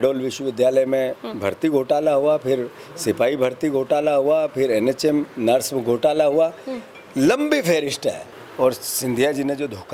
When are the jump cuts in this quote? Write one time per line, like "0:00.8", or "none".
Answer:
0:08.3